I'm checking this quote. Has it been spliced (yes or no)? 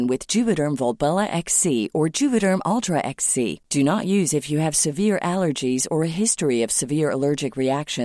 no